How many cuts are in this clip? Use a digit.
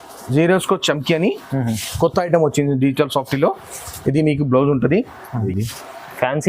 1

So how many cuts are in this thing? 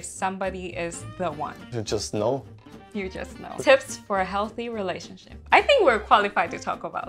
2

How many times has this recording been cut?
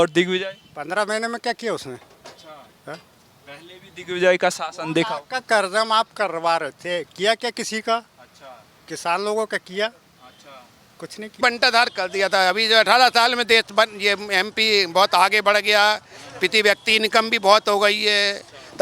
1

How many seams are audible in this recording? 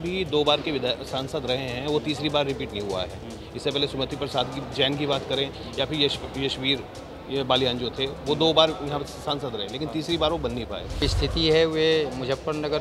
1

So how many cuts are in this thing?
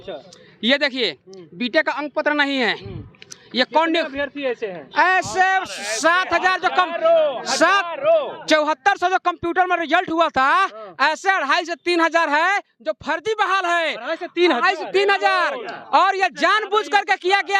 0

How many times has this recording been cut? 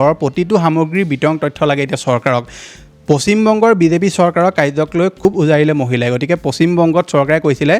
0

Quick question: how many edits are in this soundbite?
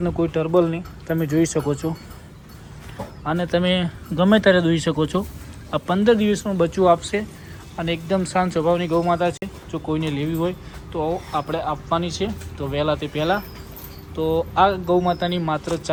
0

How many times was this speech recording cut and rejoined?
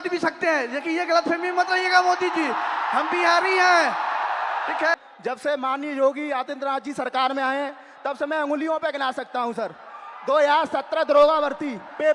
1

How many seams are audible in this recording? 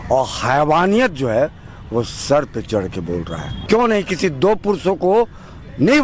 1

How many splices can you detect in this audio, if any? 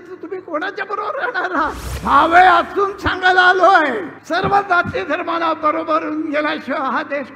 2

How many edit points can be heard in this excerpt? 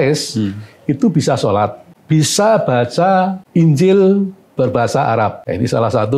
3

